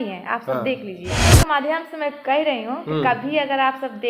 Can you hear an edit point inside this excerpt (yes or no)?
yes